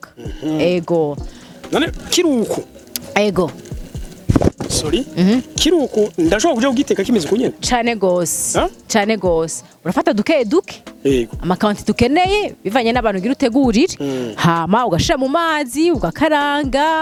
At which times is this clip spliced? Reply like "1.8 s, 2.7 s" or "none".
none

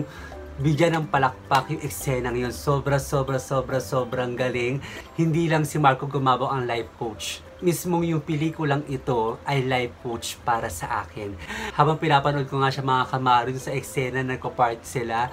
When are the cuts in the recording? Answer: 4.9 s, 11.5 s

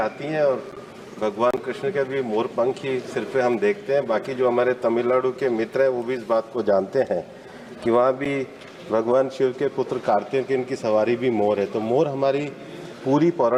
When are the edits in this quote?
none

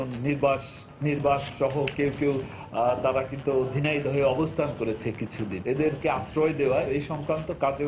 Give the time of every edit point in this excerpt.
6.9 s

